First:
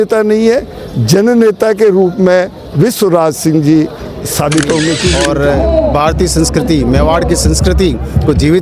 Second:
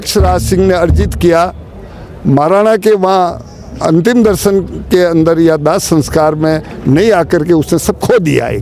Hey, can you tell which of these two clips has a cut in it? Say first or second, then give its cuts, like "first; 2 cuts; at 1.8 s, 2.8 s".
first; 1 cut; at 5.1 s